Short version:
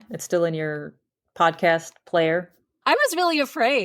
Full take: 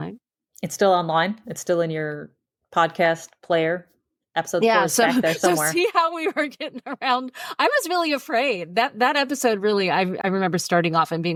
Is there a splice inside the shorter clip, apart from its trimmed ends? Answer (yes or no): yes